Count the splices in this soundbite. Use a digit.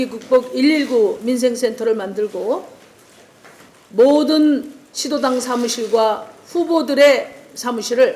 0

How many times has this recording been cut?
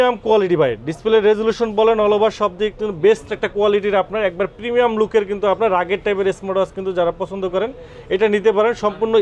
0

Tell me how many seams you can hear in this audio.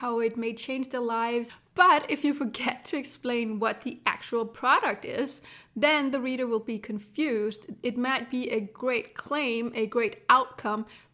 1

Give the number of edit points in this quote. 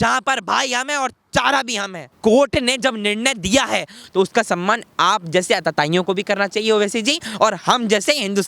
2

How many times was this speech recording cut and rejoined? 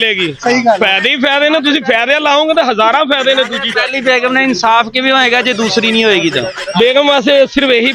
1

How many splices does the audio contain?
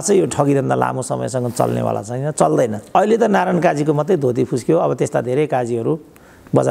1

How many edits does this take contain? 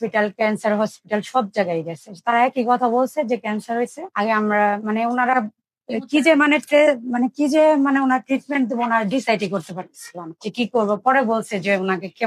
0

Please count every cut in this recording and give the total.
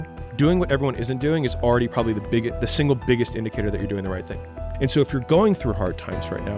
1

